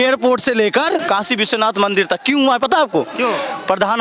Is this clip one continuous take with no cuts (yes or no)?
no